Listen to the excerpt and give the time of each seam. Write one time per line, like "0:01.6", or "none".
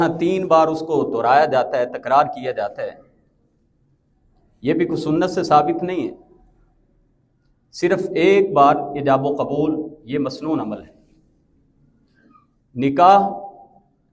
none